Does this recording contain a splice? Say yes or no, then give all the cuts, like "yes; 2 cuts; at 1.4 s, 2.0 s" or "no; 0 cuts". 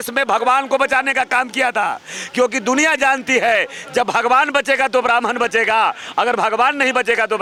no; 0 cuts